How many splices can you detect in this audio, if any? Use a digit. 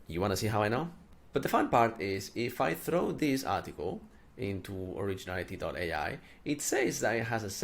1